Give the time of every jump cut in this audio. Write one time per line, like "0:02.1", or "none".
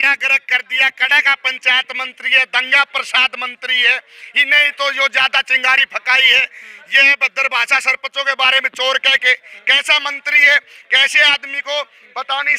none